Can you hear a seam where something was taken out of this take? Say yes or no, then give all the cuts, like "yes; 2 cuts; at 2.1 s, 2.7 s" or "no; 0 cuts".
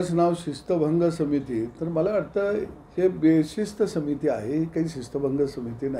no; 0 cuts